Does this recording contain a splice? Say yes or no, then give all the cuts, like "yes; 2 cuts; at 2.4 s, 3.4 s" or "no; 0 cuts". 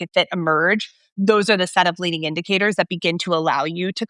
no; 0 cuts